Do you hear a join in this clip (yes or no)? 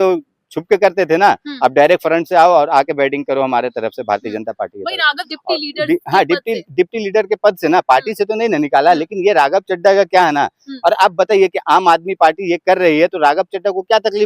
yes